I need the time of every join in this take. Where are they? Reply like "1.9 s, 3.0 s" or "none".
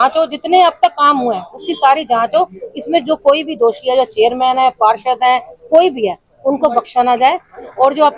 none